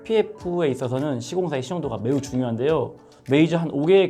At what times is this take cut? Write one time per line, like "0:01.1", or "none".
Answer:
0:03.1